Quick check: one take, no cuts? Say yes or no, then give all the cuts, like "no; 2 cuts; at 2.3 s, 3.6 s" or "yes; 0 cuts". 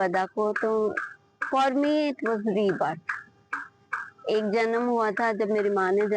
yes; 0 cuts